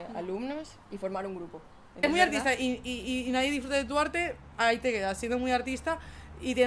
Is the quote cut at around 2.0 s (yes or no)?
yes